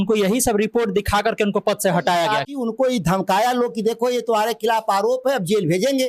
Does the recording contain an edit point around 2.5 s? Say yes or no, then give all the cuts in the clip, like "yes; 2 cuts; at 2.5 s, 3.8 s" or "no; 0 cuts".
yes; 1 cut; at 2.5 s